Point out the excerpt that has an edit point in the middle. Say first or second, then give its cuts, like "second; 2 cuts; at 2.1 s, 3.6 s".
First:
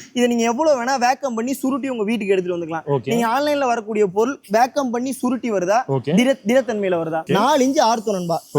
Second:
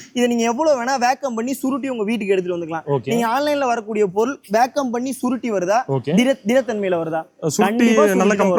first; 1 cut; at 7.2 s